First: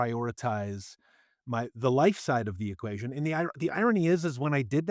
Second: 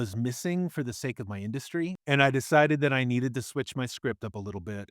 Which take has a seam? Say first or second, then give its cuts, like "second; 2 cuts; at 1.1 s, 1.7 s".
second; 1 cut; at 2.0 s